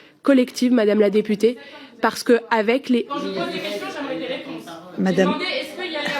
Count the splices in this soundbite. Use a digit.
2